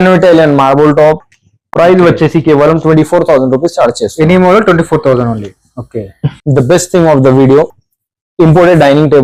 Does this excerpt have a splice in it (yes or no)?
no